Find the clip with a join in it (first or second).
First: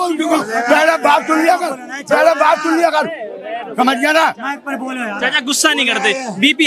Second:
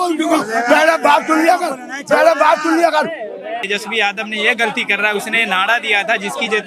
second